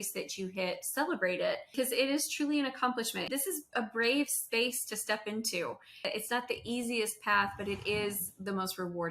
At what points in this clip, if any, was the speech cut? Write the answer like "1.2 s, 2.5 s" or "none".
1.7 s, 3.2 s, 6.1 s